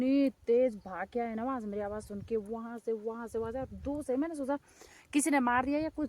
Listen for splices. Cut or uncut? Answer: uncut